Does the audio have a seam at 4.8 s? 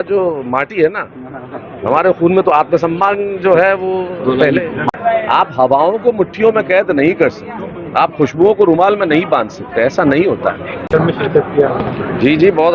yes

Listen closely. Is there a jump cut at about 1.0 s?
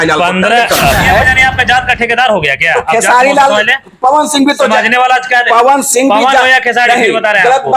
yes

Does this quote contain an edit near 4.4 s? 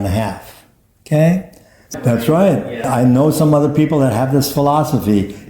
no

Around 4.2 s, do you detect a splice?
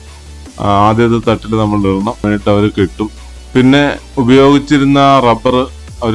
no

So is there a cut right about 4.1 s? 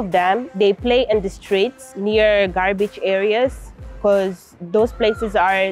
no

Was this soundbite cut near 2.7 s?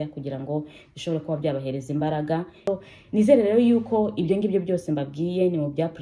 yes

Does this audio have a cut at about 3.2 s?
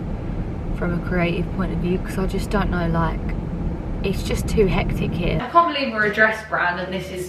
no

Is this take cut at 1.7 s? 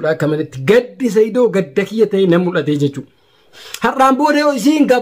no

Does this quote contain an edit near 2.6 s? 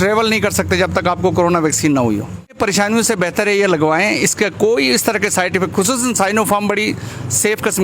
yes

